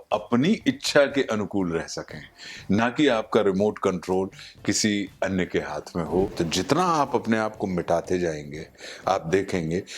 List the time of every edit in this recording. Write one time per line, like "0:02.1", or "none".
0:06.3